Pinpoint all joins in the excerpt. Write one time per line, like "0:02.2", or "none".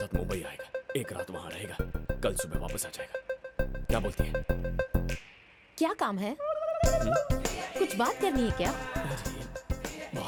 none